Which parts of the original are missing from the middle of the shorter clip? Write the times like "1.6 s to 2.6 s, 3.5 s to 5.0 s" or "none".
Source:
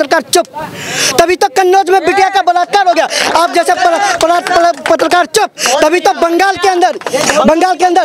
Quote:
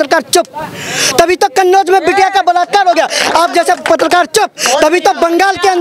3.8 s to 4.8 s